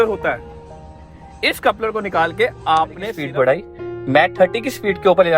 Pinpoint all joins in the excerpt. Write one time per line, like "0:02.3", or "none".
0:03.1